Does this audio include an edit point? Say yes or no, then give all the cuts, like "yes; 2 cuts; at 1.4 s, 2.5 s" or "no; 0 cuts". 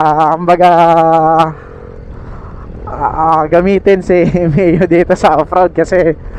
no; 0 cuts